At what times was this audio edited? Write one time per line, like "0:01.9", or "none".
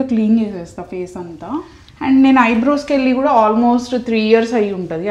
0:01.8